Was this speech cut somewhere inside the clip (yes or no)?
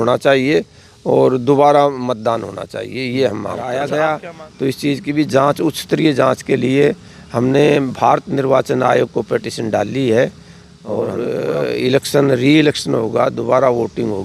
yes